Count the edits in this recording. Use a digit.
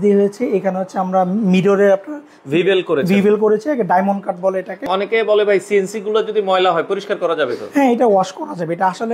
1